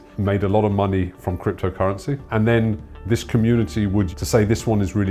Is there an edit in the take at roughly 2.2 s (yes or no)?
yes